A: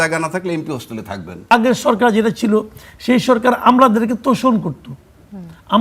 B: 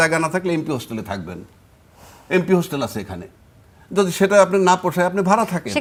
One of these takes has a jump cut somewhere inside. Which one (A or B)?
A